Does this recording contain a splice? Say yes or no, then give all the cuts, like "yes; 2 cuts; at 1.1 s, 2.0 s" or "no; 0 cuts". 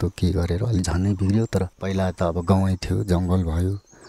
yes; 1 cut; at 1.8 s